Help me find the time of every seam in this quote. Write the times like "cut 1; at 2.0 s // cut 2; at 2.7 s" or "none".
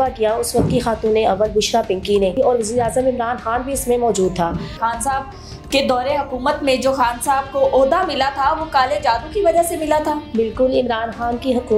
cut 1; at 2.3 s // cut 2; at 4.8 s // cut 3; at 10.2 s